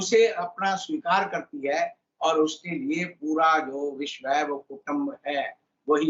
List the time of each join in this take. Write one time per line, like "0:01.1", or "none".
none